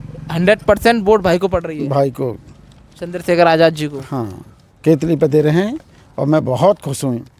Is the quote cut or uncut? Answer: uncut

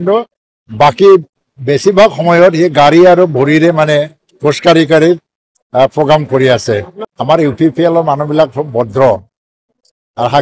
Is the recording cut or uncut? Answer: cut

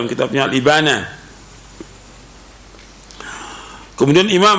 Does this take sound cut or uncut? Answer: uncut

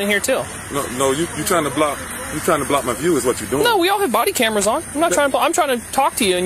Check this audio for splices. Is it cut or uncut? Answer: uncut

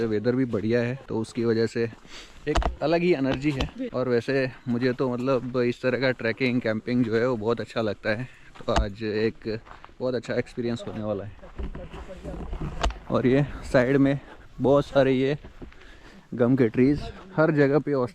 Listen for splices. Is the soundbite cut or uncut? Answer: uncut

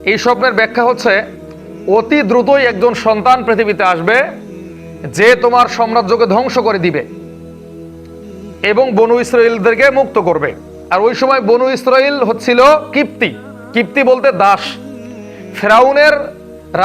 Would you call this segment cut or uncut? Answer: cut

